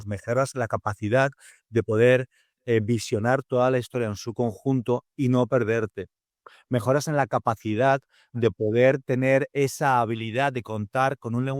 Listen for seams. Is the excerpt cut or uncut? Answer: uncut